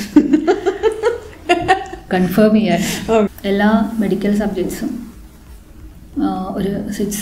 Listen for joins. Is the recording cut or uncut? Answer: cut